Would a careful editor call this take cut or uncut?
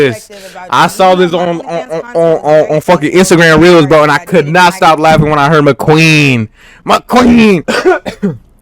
uncut